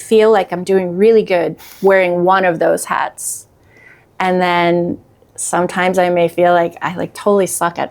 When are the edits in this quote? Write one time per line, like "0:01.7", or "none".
none